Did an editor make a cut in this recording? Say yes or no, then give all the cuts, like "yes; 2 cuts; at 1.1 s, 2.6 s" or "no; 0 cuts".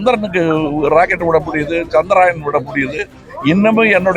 yes; 1 cut; at 3.2 s